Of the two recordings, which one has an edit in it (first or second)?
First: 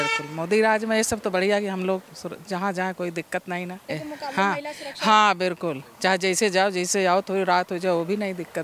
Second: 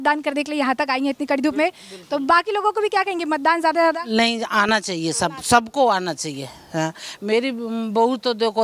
first